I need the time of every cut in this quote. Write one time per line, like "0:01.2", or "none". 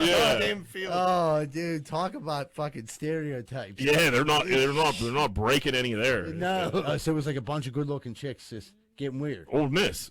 0:06.8